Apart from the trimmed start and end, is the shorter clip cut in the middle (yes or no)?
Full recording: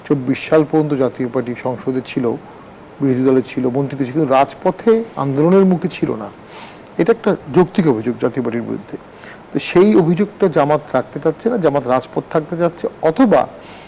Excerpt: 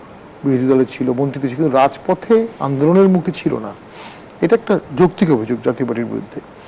no